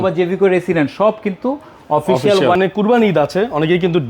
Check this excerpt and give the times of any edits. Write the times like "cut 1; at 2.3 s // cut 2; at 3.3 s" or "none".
cut 1; at 2.6 s

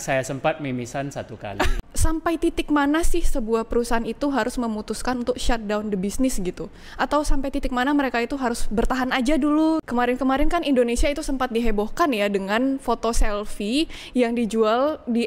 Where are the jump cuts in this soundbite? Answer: cut 1; at 1.8 s // cut 2; at 9.8 s

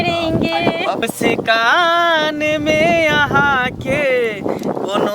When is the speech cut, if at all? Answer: cut 1; at 1.0 s

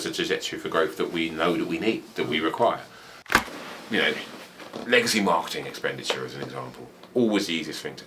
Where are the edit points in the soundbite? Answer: cut 1; at 3.2 s

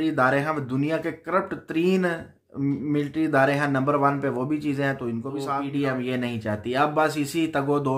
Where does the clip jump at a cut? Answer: cut 1; at 5.5 s

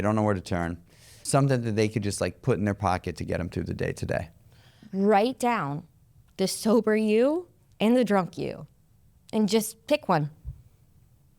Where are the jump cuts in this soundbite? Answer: cut 1; at 1.1 s // cut 2; at 4.8 s

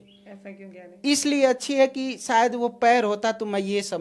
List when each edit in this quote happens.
none

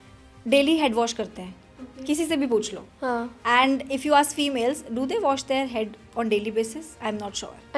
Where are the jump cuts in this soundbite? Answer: none

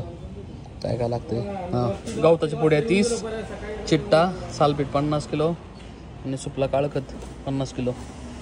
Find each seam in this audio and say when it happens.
none

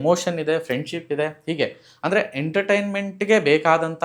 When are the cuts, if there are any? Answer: none

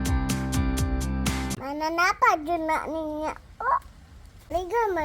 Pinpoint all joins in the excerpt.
cut 1; at 1.5 s

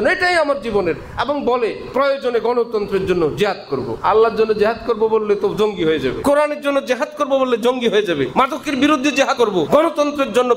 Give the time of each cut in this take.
cut 1; at 4.0 s // cut 2; at 6.2 s // cut 3; at 8.3 s // cut 4; at 9.4 s

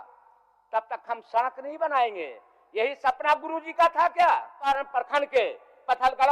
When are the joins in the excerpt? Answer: cut 1; at 4.7 s

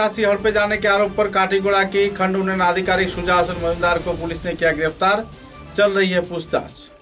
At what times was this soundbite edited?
none

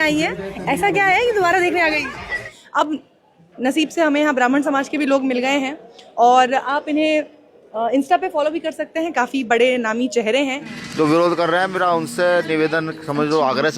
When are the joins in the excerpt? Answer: cut 1; at 2.5 s // cut 2; at 10.7 s

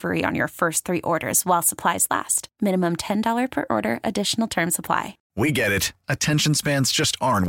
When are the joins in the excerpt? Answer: cut 1; at 5.2 s

